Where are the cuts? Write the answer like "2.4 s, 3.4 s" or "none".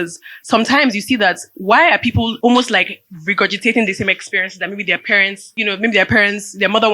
2.3 s, 5.4 s